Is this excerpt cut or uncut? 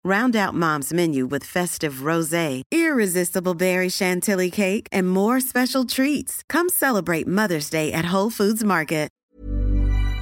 cut